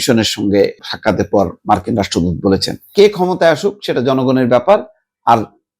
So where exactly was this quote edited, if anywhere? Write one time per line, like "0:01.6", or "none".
0:02.9